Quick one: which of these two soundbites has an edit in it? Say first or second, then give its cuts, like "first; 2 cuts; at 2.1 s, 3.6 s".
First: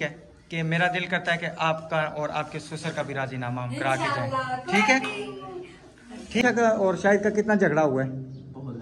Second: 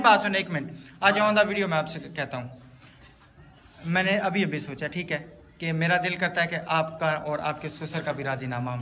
first; 1 cut; at 6.4 s